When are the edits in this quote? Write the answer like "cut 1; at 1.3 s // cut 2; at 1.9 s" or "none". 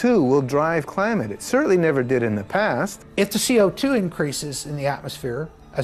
cut 1; at 3.0 s

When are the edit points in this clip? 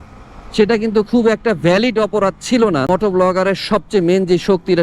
cut 1; at 2.9 s

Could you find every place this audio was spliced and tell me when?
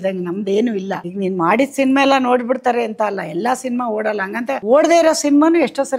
cut 1; at 1.0 s // cut 2; at 4.6 s

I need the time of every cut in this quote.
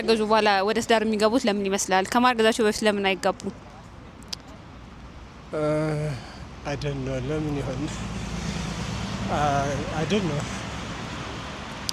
none

